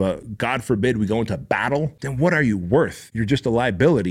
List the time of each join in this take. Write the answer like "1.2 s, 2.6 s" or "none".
2.0 s, 3.1 s